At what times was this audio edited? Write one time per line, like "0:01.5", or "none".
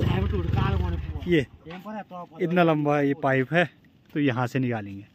none